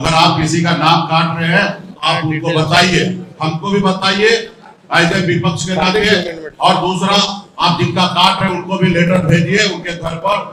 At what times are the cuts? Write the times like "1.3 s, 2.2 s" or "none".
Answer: none